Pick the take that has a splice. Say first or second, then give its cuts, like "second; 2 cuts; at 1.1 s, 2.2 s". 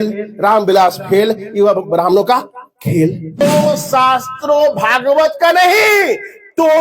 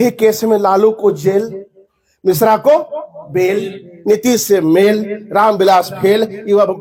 first; 1 cut; at 3.4 s